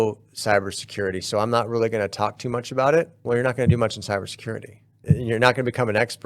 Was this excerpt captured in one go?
no; 2 cuts; at 3.2 s, 4.9 s

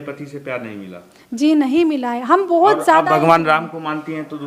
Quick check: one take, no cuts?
yes; 0 cuts

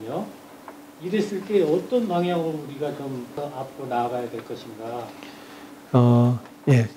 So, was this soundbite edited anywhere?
yes; 1 cut; at 3.3 s

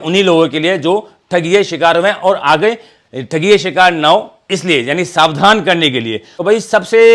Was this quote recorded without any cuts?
no; 1 cut; at 6.3 s

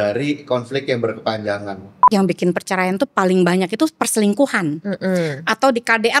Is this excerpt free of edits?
no; 1 cut; at 2.0 s

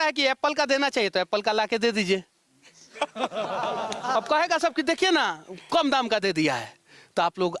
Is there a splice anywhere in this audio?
no; 0 cuts

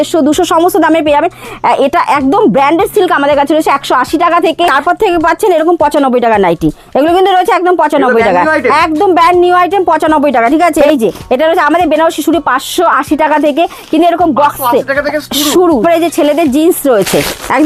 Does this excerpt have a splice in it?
yes; 3 cuts; at 4.8 s, 10.9 s, 15.8 s

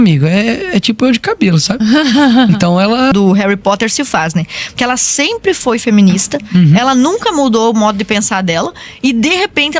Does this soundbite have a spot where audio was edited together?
yes; 1 cut; at 3.1 s

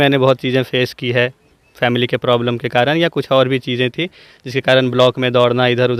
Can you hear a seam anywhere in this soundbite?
no; 0 cuts

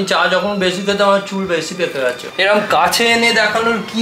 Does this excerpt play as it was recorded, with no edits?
no; 1 cut; at 2.0 s

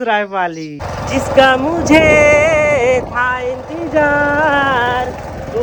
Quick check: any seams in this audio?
no; 0 cuts

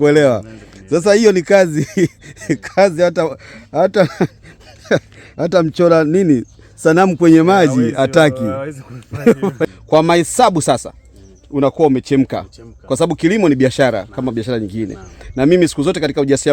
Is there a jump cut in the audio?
yes; 1 cut; at 9.7 s

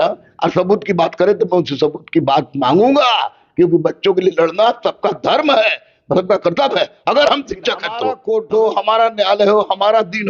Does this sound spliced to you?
yes; 1 cut; at 8.1 s

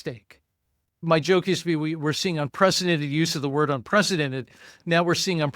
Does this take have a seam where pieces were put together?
yes; 1 cut; at 1.0 s

